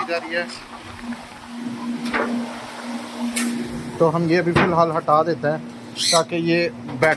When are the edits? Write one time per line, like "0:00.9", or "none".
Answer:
none